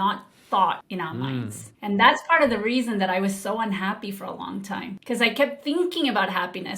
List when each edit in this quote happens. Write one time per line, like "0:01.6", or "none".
0:00.9
0:04.9